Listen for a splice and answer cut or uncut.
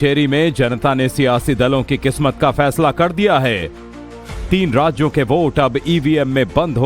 cut